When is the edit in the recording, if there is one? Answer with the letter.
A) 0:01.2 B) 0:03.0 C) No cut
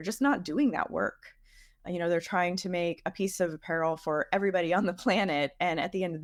C